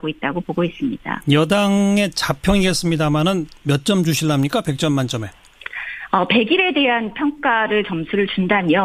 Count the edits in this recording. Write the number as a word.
zero